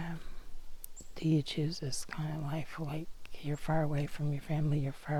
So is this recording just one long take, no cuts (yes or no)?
yes